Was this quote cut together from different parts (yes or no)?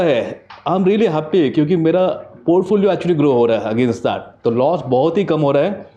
no